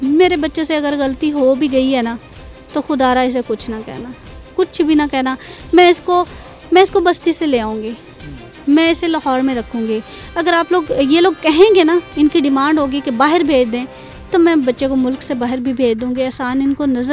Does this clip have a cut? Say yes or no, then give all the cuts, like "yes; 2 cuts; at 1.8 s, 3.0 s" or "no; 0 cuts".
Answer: no; 0 cuts